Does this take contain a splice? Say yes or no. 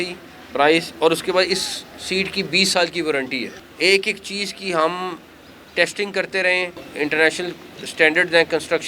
yes